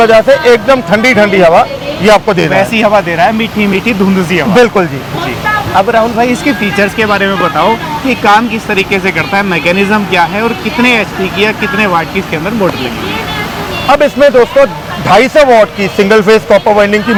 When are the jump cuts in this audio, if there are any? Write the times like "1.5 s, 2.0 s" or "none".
none